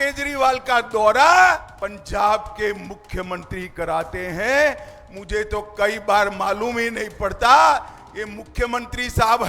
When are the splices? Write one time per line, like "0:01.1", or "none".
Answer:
0:01.7